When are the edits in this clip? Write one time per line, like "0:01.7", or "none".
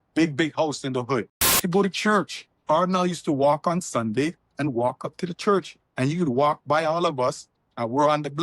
0:01.6